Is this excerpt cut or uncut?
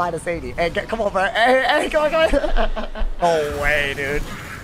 cut